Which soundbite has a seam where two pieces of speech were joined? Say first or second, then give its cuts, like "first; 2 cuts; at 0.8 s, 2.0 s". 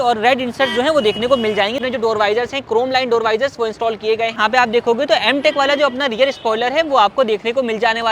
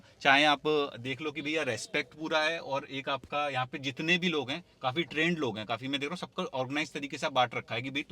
first; 2 cuts; at 1.8 s, 4.4 s